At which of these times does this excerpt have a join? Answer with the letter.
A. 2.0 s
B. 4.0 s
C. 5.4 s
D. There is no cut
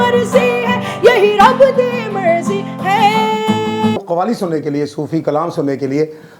B